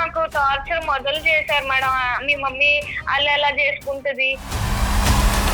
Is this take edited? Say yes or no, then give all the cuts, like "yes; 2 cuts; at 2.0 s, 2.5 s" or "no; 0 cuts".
yes; 1 cut; at 4.5 s